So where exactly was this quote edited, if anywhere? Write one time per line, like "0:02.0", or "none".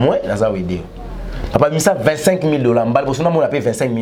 none